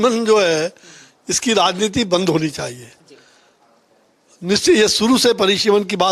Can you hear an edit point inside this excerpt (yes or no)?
no